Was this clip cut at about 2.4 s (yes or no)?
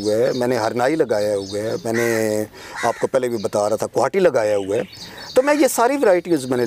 no